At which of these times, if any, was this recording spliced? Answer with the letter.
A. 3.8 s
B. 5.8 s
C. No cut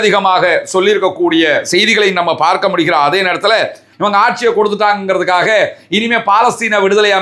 A